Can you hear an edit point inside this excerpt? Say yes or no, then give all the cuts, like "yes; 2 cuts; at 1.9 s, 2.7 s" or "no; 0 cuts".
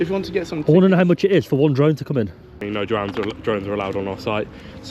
yes; 1 cut; at 2.6 s